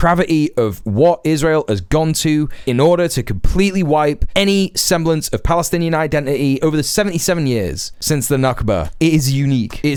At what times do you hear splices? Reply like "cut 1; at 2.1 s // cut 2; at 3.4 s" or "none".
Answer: none